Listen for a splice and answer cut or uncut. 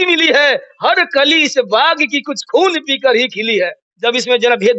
cut